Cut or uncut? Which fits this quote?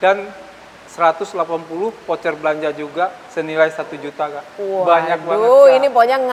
uncut